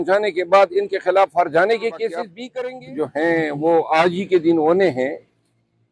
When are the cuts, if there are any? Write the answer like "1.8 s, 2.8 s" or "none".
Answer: 2.4 s